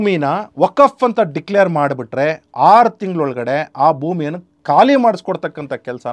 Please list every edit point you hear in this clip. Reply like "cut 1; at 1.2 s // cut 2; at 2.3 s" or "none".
cut 1; at 4.5 s